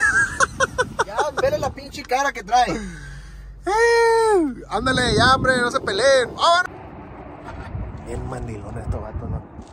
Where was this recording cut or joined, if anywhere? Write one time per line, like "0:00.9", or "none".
0:06.6